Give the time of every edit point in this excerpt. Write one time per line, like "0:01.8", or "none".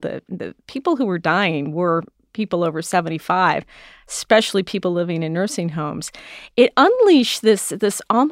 none